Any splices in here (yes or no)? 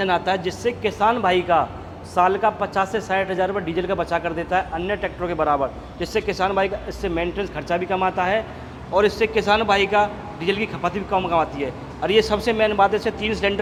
no